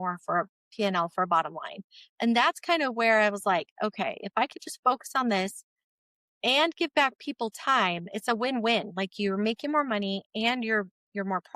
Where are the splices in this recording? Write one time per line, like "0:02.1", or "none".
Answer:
none